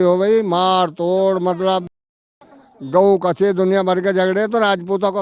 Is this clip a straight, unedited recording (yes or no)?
yes